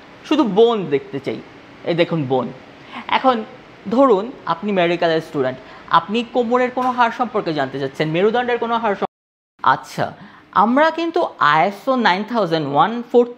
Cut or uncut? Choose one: cut